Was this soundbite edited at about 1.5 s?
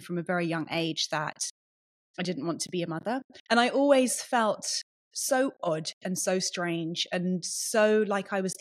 no; 1 cut; at 3.3 s

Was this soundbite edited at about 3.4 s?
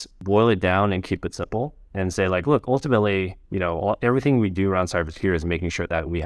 no; 0 cuts

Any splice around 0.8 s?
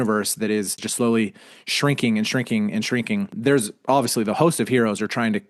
yes; 2 cuts; at 0.8 s, 3.3 s

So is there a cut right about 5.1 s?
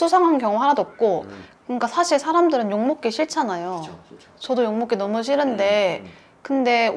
no; 1 cut; at 1.4 s

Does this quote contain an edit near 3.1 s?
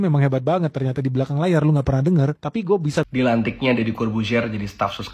yes; 1 cut; at 3.1 s

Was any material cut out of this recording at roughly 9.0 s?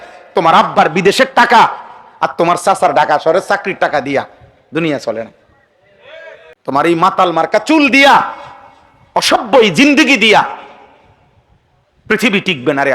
no; 1 cut; at 6.4 s

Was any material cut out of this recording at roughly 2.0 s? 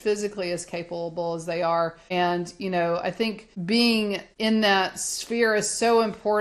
yes; 3 cuts; at 2.0 s, 3.5 s, 4.3 s

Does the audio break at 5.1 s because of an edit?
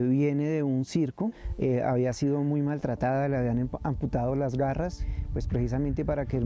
yes; 2 cuts; at 1.4 s, 5.1 s

